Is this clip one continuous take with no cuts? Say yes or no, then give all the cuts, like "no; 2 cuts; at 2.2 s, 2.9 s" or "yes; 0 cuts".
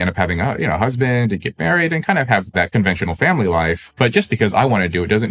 no; 2 cuts; at 2.5 s, 3.9 s